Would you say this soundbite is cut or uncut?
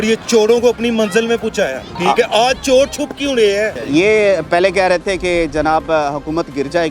cut